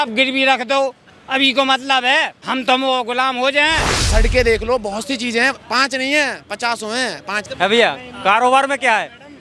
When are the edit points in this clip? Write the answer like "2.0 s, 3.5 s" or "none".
3.9 s, 7.4 s